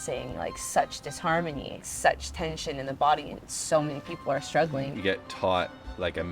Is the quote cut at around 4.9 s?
yes; 2 cuts; at 1.9 s, 4.9 s

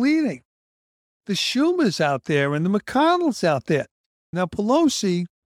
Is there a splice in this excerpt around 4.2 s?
yes; 1 cut; at 4.2 s

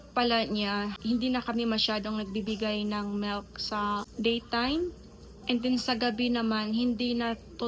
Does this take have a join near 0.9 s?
yes; 1 cut; at 0.9 s

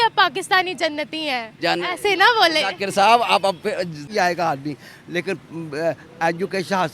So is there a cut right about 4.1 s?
yes; 1 cut; at 4.1 s

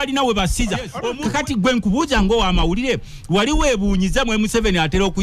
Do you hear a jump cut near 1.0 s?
yes; 1 cut; at 1.0 s

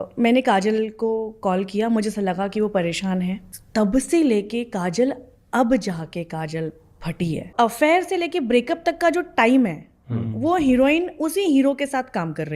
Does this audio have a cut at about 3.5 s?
yes; 2 cuts; at 3.5 s, 7.5 s

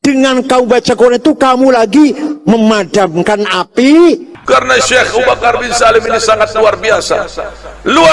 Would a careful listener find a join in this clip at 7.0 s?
no; 1 cut; at 4.3 s

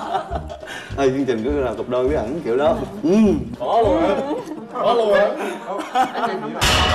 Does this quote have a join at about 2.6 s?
no; 0 cuts

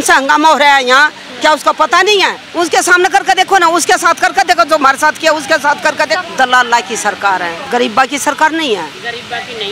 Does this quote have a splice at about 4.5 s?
no; 3 cuts; at 2.4 s, 6.2 s, 7.6 s

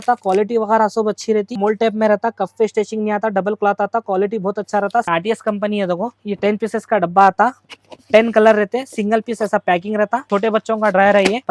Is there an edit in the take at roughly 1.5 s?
yes; 4 cuts; at 1.5 s, 5.1 s, 6.1 s, 10.2 s

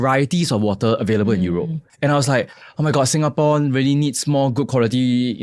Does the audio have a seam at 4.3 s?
no; 1 cut; at 1.8 s

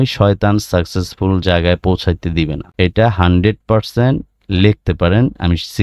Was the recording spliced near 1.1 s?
no; 1 cut; at 2.6 s

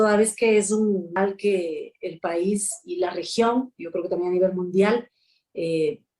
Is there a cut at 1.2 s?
yes; 1 cut; at 1.2 s

